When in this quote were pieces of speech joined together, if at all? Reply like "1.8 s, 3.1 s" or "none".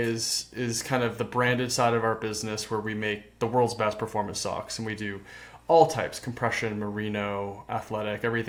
none